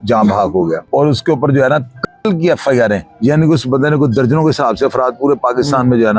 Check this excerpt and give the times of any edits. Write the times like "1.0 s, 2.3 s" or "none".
0.8 s, 3.1 s